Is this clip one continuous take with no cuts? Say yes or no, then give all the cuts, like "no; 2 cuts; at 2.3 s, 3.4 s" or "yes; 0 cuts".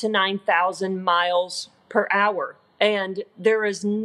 no; 1 cut; at 2.6 s